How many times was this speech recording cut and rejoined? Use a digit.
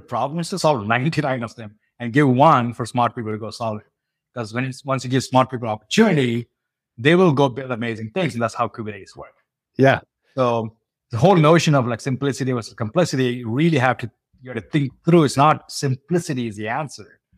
0